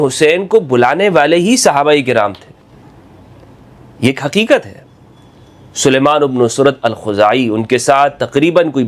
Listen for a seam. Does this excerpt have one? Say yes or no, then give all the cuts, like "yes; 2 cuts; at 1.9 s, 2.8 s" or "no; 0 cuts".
no; 0 cuts